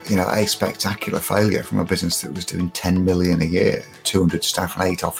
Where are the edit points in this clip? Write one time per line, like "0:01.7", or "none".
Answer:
0:03.9

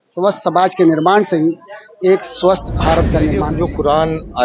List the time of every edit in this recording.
0:03.5

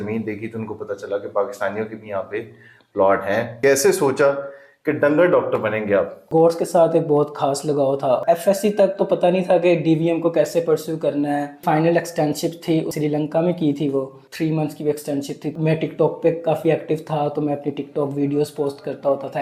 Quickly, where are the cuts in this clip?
0:03.5
0:06.2
0:08.2
0:11.6
0:15.4

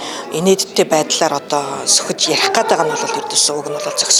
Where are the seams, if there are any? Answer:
none

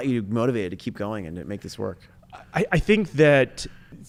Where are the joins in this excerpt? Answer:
none

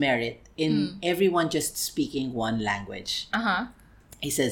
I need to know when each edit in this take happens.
0:03.2

